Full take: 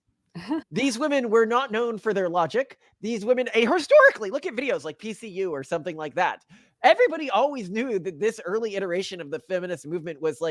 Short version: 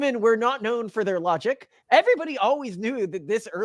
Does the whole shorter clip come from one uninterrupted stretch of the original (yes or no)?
no